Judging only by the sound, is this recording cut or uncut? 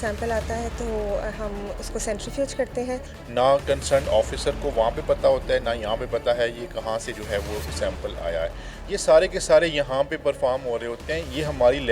cut